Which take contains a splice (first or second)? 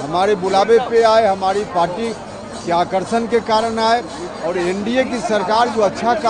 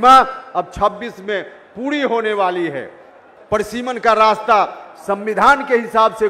second